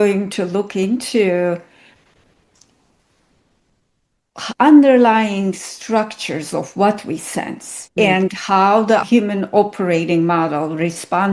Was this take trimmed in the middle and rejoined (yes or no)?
no